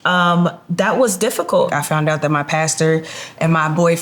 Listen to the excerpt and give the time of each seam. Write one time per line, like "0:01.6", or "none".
0:01.7

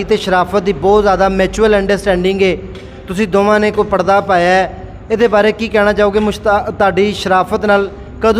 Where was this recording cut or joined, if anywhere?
none

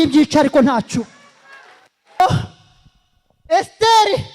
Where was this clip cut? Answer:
0:02.2

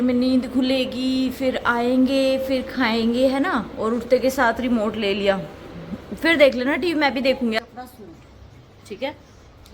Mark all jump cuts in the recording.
0:07.6

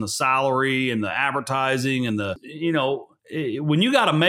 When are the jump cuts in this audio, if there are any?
0:02.5
0:03.2

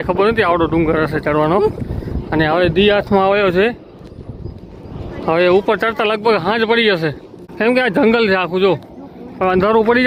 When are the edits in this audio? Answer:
none

